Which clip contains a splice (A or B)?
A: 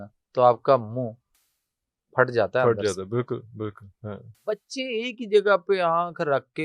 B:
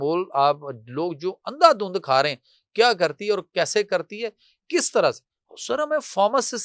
A